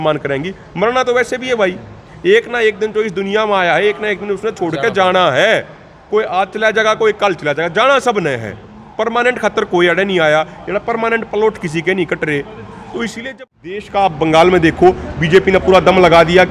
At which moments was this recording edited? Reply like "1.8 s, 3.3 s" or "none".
13.2 s